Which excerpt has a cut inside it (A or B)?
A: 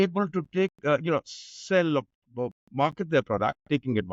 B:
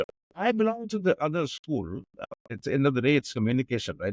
B